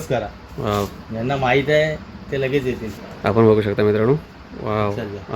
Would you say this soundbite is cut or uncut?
cut